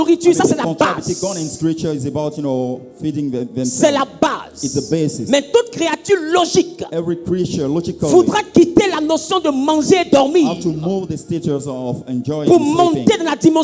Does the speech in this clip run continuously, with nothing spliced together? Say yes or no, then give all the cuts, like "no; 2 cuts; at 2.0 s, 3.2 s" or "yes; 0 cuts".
yes; 0 cuts